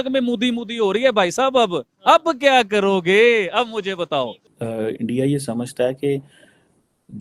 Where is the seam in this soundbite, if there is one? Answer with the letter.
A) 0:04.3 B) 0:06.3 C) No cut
C